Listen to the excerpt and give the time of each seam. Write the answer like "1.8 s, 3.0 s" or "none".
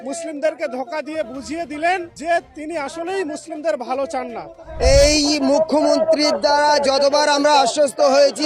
2.1 s, 4.7 s